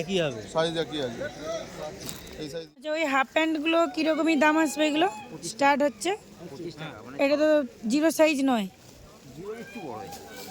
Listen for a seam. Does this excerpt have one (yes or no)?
yes